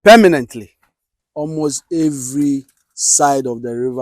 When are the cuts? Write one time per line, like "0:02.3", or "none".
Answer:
0:01.4